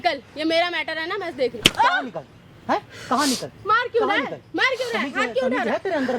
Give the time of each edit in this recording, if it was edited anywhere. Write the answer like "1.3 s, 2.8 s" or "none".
none